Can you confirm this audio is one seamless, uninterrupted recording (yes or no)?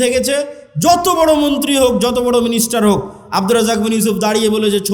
yes